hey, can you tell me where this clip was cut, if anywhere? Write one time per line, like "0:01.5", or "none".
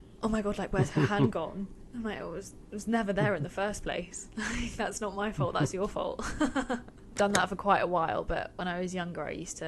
0:07.1